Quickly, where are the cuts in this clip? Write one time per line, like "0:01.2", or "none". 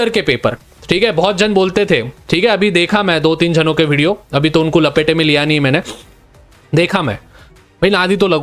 none